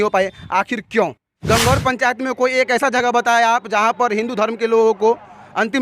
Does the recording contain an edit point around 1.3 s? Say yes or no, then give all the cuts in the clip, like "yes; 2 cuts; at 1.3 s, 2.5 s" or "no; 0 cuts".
yes; 1 cut; at 1.3 s